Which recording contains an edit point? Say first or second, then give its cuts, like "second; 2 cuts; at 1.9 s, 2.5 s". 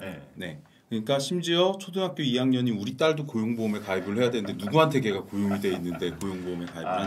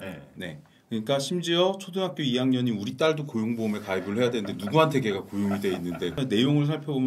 second; 1 cut; at 6.2 s